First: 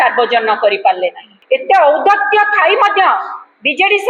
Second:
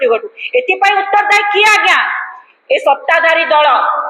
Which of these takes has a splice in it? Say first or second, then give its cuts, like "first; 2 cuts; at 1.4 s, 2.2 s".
first; 1 cut; at 1.3 s